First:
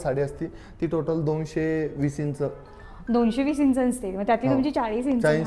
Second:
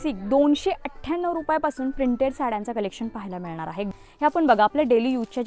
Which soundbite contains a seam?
second; 1 cut; at 4.0 s

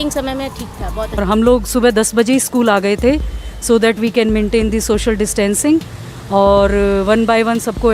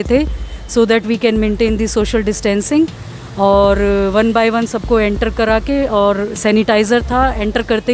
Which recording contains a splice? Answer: first; 1 cut; at 1.2 s

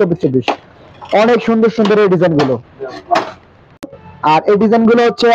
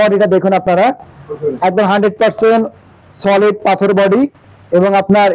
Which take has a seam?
first; 1 cut; at 3.9 s

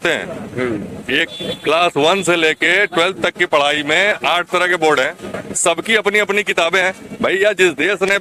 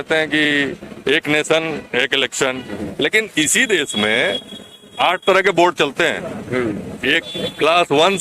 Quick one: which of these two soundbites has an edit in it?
second; 1 cut; at 2.8 s

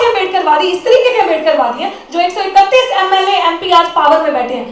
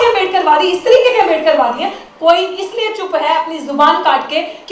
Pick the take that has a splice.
second; 1 cut; at 2.0 s

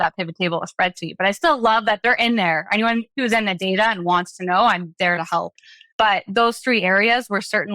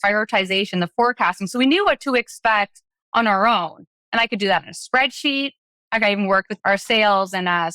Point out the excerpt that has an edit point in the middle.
second; 1 cut; at 6.5 s

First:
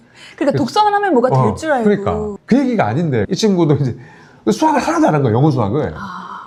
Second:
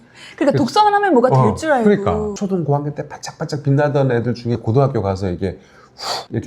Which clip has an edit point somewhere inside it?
second; 1 cut; at 2.3 s

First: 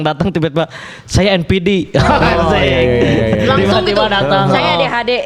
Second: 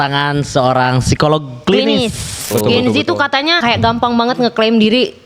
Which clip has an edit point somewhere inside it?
second; 2 cuts; at 2.4 s, 3.6 s

